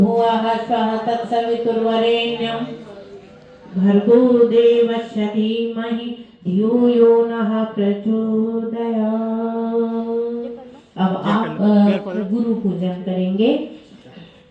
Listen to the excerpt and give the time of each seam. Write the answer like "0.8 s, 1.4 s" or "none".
none